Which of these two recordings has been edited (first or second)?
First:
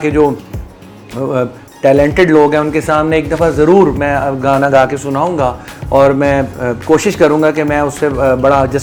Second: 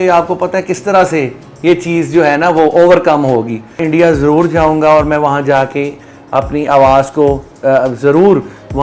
second